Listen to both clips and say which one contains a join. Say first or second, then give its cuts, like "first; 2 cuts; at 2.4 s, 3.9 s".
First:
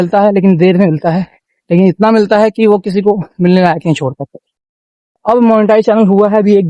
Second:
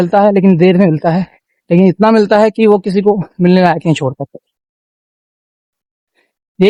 first; 1 cut; at 5.2 s